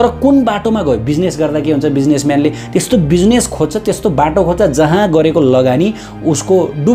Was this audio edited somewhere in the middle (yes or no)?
no